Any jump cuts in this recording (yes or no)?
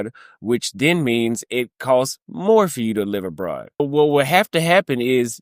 yes